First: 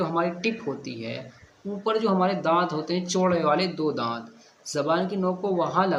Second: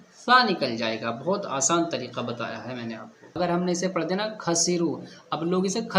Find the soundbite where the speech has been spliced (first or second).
second